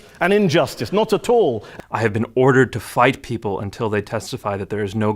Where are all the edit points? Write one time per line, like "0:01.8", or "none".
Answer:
0:01.7